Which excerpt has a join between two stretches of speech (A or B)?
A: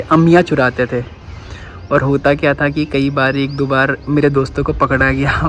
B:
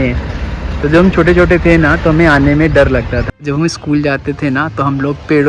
B